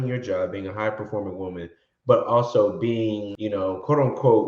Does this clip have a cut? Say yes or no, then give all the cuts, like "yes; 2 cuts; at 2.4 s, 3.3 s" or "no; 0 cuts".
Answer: yes; 1 cut; at 3.3 s